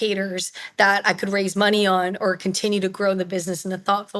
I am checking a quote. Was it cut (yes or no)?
no